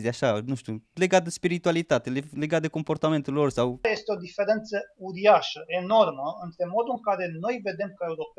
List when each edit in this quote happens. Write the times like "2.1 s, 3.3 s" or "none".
0.9 s, 3.8 s